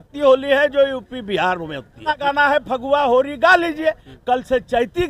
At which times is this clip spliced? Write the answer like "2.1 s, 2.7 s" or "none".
2.2 s